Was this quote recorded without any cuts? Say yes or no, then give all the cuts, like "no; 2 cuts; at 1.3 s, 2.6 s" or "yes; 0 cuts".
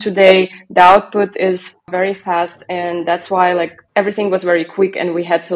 no; 2 cuts; at 1.9 s, 3.8 s